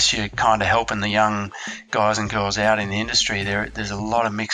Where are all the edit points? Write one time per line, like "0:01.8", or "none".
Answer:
none